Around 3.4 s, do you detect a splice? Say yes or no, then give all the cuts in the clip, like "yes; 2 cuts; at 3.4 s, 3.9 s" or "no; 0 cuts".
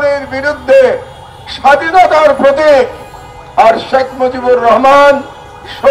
no; 0 cuts